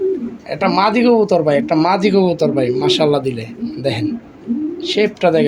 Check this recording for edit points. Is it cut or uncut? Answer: uncut